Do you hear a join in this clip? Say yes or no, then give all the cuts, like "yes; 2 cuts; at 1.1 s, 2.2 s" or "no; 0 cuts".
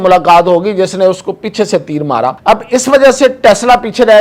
yes; 1 cut; at 2.4 s